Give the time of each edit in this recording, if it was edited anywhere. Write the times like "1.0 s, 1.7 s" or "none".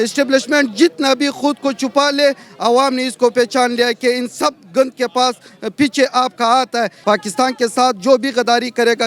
6.9 s